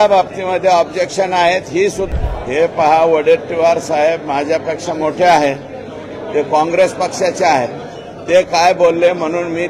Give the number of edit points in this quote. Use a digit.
1